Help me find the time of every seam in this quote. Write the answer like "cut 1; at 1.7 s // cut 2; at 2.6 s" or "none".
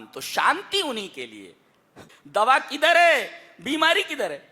cut 1; at 2.1 s